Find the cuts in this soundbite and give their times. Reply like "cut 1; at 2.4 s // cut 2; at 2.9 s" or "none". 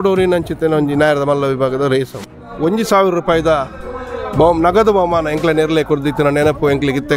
cut 1; at 2.5 s